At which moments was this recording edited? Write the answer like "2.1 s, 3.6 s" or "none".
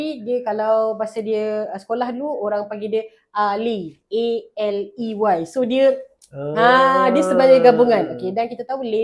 none